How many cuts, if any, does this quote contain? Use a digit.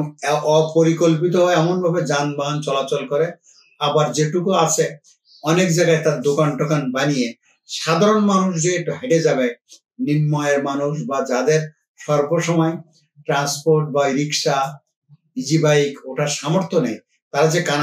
0